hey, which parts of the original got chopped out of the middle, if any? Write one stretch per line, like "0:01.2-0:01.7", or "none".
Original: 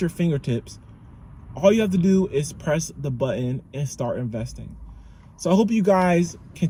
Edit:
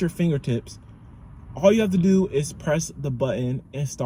none